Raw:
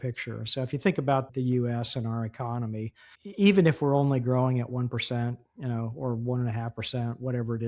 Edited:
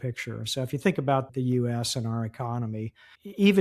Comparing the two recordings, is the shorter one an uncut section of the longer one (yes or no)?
yes